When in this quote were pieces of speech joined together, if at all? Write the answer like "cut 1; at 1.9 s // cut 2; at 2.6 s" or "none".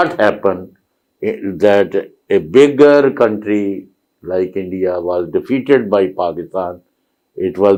none